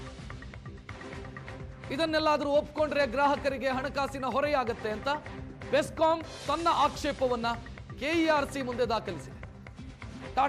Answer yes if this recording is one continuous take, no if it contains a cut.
yes